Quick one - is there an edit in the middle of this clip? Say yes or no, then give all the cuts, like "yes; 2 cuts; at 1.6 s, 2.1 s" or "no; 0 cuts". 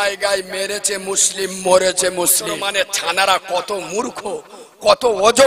yes; 1 cut; at 2.5 s